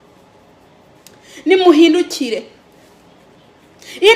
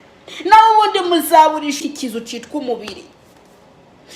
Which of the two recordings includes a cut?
second; 1 cut; at 1.8 s

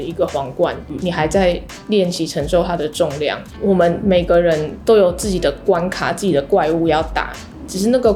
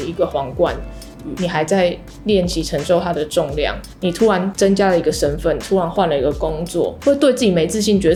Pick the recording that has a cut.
first; 2 cuts; at 0.9 s, 3.5 s

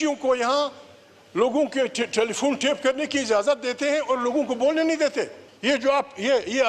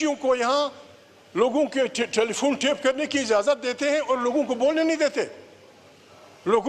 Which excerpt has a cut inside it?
first; 1 cut; at 5.5 s

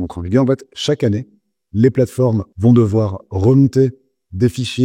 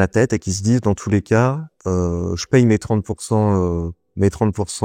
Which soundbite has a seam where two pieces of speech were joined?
first; 1 cut; at 2.5 s

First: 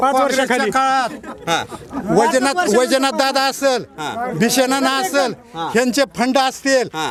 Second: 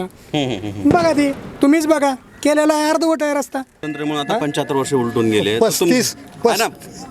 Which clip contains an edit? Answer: second; 1 cut; at 3.8 s

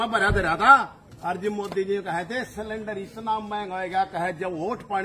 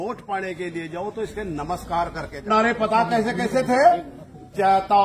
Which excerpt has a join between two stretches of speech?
second; 1 cut; at 2.5 s

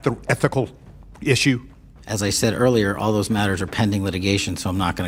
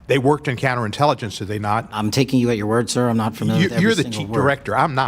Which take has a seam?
second; 1 cut; at 1.9 s

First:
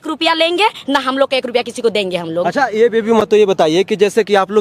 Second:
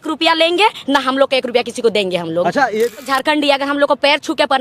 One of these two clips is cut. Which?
second; 1 cut; at 3.0 s

